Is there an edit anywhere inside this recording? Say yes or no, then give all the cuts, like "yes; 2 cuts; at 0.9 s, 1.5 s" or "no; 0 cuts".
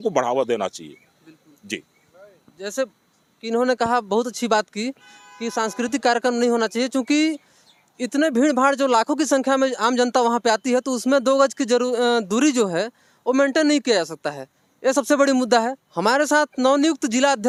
no; 0 cuts